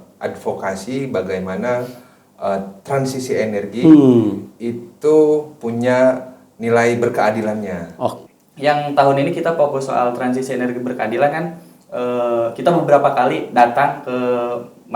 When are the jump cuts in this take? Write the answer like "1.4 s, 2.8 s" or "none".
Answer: 8.2 s